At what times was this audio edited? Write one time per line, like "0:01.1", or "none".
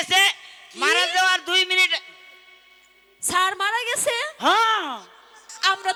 none